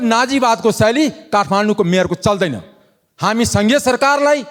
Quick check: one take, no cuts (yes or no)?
yes